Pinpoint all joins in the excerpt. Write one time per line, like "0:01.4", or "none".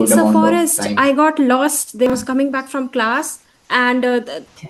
0:02.1